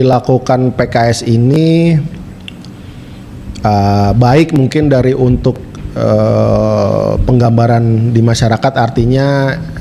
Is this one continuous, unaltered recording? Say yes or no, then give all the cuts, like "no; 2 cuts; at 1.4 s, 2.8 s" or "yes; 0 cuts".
yes; 0 cuts